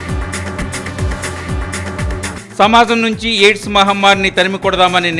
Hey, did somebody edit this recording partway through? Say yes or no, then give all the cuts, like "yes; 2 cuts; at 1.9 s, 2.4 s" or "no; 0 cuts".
yes; 1 cut; at 2.3 s